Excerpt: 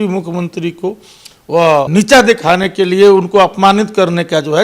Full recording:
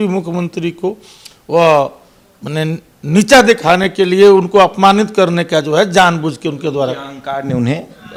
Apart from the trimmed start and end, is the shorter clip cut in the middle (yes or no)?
yes